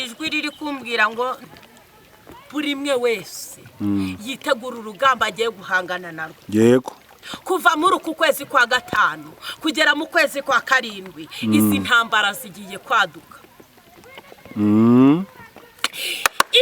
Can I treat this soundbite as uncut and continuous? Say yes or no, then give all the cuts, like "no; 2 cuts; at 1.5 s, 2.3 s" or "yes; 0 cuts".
no; 1 cut; at 1.4 s